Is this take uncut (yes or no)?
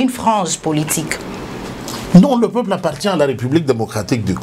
yes